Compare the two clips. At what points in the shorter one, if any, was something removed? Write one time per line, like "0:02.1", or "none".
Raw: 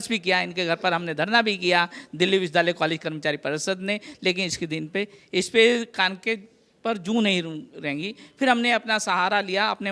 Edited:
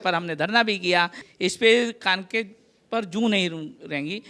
0:01.2